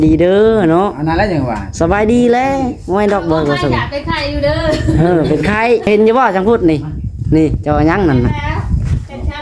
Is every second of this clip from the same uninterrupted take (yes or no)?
no